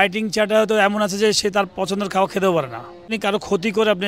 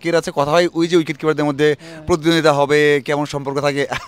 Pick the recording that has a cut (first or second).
first